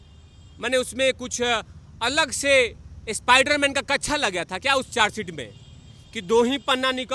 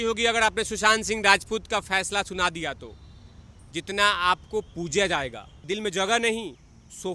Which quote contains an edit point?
second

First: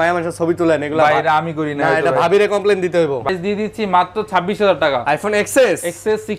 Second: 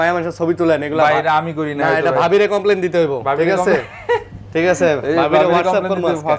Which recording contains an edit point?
first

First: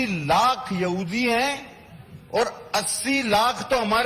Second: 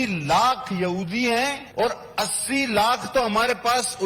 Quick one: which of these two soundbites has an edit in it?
second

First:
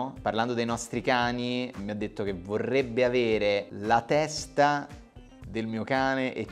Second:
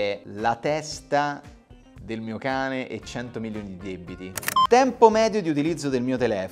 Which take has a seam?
second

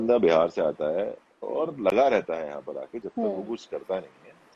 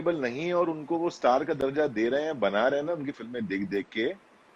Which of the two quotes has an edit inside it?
first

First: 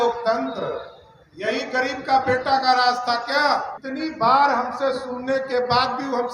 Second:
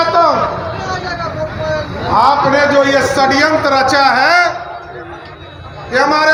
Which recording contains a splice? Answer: first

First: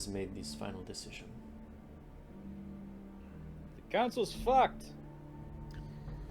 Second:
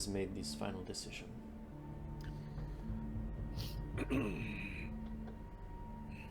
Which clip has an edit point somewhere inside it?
second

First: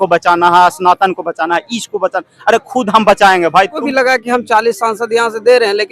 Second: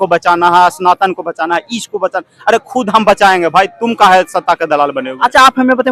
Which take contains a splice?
first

